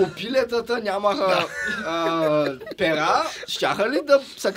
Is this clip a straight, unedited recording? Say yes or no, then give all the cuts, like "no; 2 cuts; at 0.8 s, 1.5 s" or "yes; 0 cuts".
yes; 0 cuts